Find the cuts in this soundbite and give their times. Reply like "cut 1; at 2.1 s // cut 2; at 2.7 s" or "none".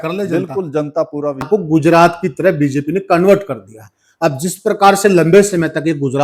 cut 1; at 1.4 s